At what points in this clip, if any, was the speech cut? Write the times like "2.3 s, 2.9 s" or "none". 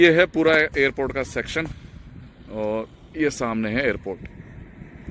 none

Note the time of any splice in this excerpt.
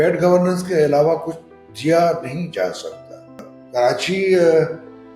3.5 s

